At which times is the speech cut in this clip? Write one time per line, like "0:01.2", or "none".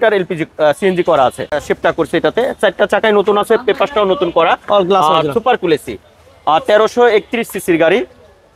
0:01.5

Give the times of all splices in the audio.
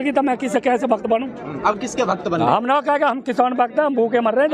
none

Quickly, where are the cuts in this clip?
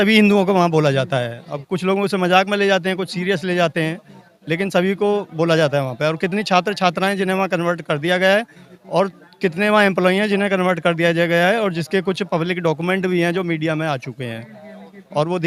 none

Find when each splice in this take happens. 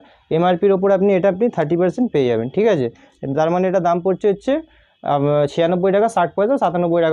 none

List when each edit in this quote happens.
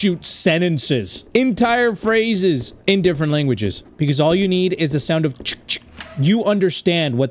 0:01.2
0:02.7
0:03.8

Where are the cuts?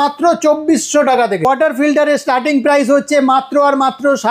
0:01.5

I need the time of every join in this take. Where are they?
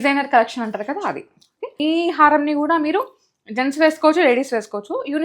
0:01.7

